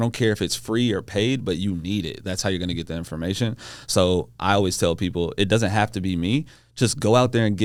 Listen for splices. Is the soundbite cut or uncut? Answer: uncut